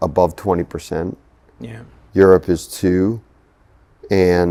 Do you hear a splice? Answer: no; 0 cuts

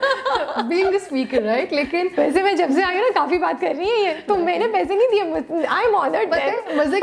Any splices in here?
no; 0 cuts

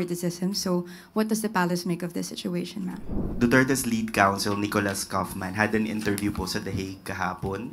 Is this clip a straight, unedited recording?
no; 1 cut; at 3.3 s

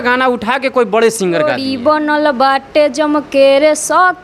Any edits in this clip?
yes; 1 cut; at 1.5 s

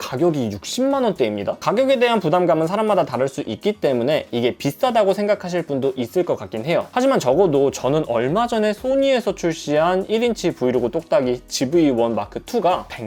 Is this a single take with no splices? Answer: yes; 0 cuts

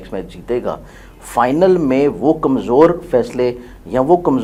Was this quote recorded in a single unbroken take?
yes; 0 cuts

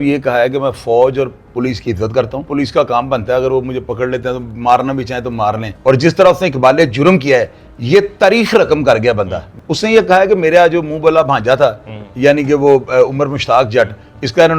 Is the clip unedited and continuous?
no; 3 cuts; at 2.5 s, 5.7 s, 9.4 s

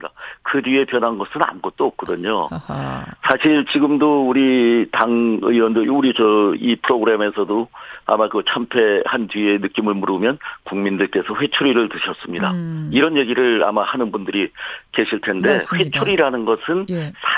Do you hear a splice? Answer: no; 0 cuts

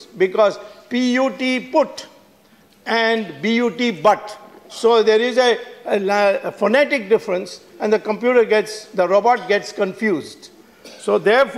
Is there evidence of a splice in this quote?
no; 0 cuts

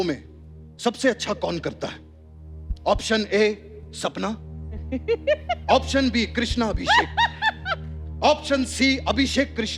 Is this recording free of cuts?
yes; 0 cuts

